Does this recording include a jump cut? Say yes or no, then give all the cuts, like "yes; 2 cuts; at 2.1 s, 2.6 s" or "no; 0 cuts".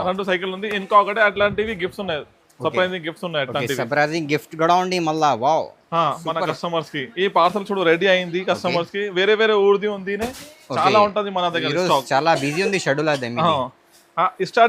no; 0 cuts